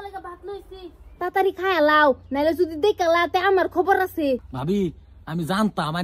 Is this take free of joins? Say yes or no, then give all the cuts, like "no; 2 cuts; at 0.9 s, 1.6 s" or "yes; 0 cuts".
no; 1 cut; at 1.1 s